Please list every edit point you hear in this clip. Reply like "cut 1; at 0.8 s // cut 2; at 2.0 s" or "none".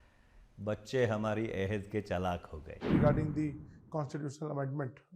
cut 1; at 2.7 s